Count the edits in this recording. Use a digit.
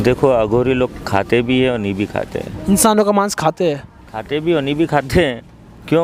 0